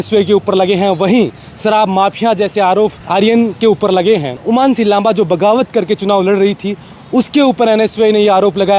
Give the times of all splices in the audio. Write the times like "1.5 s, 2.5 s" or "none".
3.0 s, 4.4 s